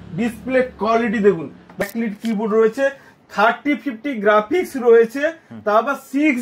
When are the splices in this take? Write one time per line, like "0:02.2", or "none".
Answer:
0:01.8